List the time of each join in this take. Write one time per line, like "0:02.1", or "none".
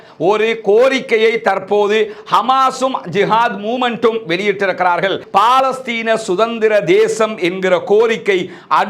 0:05.2